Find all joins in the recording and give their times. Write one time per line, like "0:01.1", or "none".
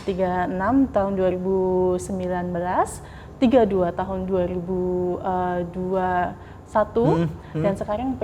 none